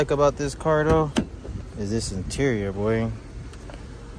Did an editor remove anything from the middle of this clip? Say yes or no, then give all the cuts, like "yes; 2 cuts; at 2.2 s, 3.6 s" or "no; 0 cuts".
no; 0 cuts